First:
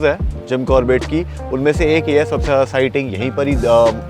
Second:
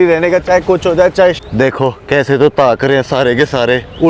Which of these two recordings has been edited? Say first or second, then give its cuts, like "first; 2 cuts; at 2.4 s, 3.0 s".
second; 1 cut; at 1.4 s